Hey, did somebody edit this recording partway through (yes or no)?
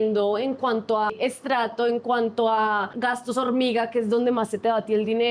yes